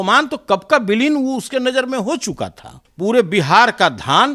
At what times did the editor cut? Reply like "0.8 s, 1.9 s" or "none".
2.9 s